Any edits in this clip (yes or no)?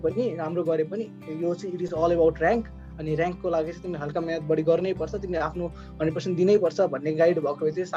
no